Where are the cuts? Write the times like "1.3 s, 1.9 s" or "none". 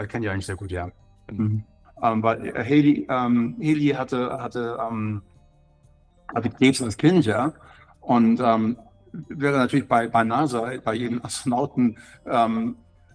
1.8 s